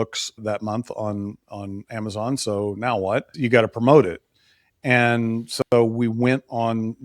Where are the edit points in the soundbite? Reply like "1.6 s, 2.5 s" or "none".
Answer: 3.3 s